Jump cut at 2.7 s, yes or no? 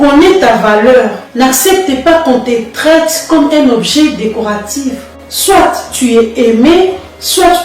no